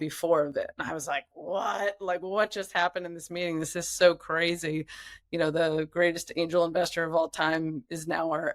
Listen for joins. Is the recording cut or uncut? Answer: uncut